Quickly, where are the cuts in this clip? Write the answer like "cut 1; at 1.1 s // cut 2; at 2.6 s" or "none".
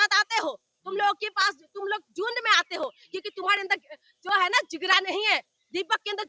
none